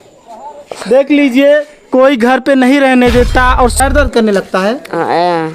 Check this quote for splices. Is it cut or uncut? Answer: cut